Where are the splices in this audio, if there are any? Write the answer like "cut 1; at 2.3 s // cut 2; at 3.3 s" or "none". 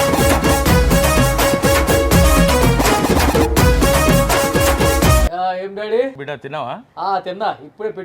cut 1; at 5.2 s // cut 2; at 6.2 s

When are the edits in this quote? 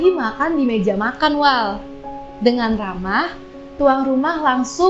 none

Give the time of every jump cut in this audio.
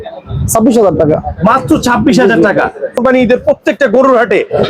cut 1; at 3.0 s

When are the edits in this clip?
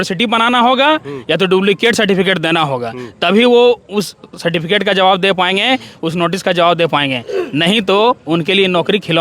none

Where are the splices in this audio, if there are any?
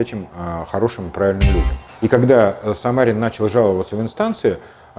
cut 1; at 1.8 s

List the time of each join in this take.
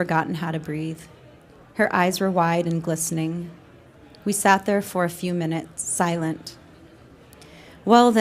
cut 1; at 2.9 s

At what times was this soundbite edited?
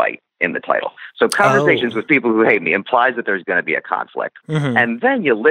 cut 1; at 2.0 s // cut 2; at 4.4 s

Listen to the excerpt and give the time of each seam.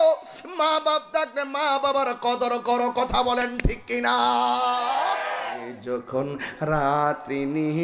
cut 1; at 5.8 s

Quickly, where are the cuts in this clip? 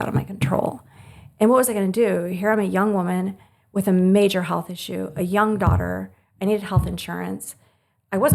none

